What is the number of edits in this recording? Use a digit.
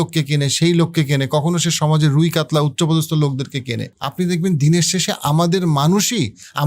1